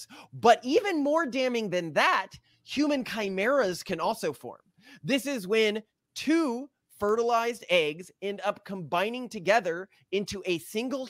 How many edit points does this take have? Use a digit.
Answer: 0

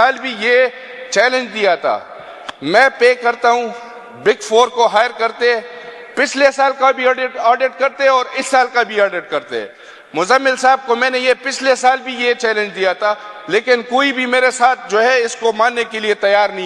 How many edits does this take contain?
0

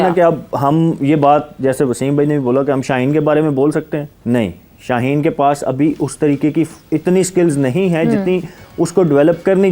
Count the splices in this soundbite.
1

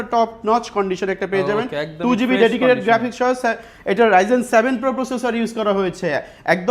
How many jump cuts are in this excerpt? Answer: 0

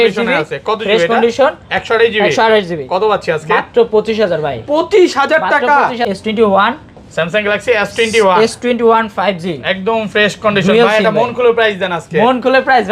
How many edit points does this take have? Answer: 1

